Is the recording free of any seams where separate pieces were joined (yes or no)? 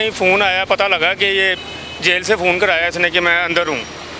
yes